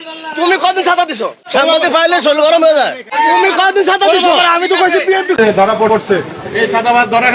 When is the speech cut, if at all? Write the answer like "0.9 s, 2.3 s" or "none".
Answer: 5.4 s